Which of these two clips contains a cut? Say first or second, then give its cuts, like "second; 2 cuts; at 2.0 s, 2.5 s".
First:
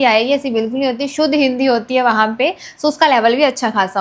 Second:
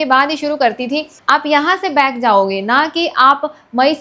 second; 1 cut; at 1.2 s